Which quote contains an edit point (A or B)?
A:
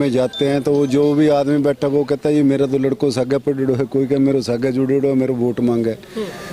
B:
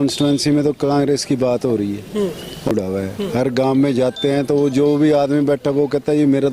B